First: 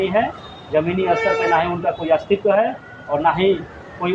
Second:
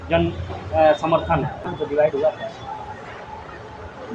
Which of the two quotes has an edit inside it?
second; 1 cut; at 1.6 s

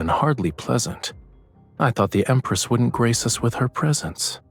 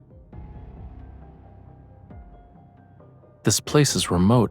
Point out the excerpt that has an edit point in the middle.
second; 1 cut; at 3.4 s

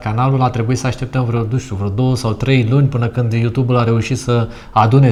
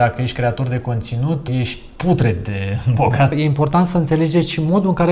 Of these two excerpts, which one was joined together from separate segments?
second; 2 cuts; at 1.5 s, 3.3 s

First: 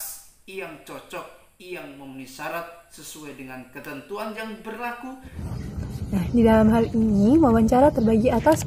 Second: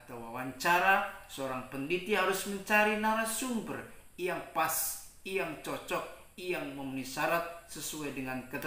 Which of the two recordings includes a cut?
first; 1 cut; at 5.3 s

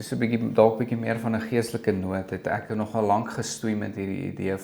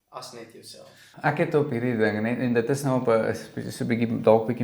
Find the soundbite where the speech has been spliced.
second; 1 cut; at 1.1 s

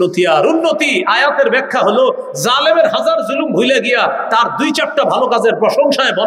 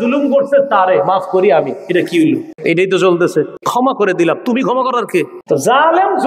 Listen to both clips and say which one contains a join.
second; 3 cuts; at 2.5 s, 3.6 s, 5.4 s

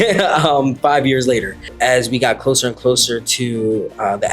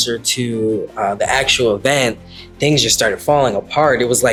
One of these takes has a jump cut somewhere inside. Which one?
first; 1 cut; at 1.7 s

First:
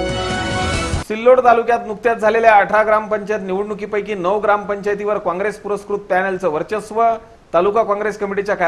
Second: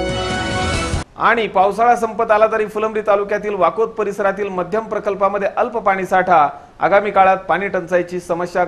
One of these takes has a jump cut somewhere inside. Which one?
first; 1 cut; at 1.0 s

